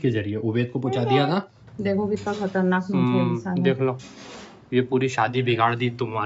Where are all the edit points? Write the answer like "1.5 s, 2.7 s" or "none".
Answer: 1.6 s